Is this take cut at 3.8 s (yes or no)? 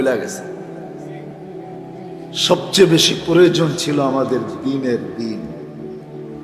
no